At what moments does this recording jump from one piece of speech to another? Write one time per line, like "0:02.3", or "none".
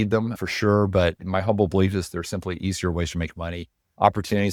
none